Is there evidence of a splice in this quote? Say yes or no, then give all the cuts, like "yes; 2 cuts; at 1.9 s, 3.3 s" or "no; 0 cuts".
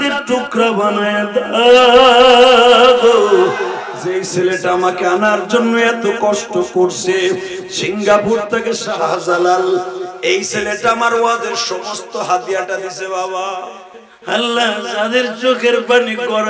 yes; 3 cuts; at 3.9 s, 8.8 s, 13.8 s